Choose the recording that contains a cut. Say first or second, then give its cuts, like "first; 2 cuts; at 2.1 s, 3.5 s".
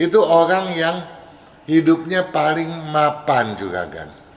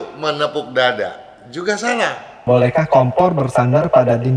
second; 1 cut; at 2.4 s